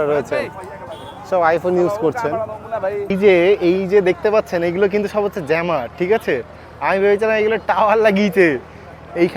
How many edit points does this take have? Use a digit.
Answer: 1